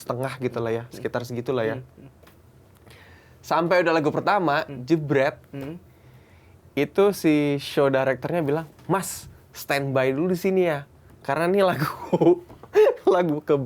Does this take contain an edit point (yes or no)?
no